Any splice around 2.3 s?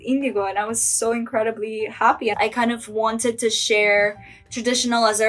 yes; 1 cut; at 2.3 s

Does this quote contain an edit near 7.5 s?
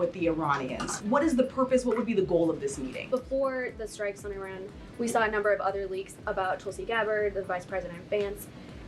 no; 2 cuts; at 1.0 s, 2.9 s

